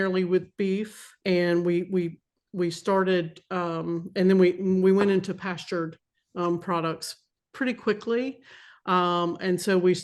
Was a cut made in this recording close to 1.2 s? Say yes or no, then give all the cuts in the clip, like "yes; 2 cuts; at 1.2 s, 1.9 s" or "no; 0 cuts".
yes; 1 cut; at 1.2 s